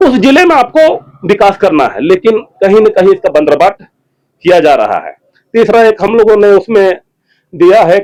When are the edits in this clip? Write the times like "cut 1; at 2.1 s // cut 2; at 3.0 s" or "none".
none